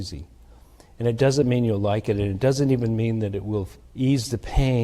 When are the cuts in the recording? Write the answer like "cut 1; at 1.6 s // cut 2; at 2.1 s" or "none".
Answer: cut 1; at 3.8 s